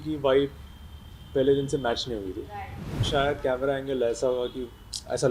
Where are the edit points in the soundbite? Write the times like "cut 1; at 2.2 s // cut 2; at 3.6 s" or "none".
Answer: cut 1; at 3.1 s